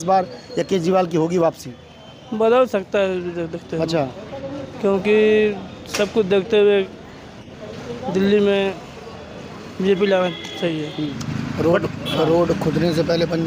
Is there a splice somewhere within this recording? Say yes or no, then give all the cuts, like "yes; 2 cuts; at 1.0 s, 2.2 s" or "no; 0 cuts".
yes; 1 cut; at 11.2 s